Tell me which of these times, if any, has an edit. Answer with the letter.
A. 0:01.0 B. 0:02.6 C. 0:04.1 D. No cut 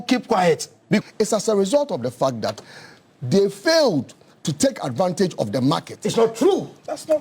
A